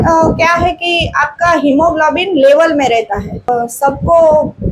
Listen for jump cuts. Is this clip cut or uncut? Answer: cut